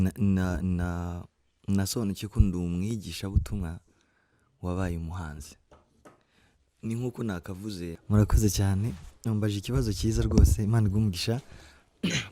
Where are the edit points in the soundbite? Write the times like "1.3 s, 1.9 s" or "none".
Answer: 8.0 s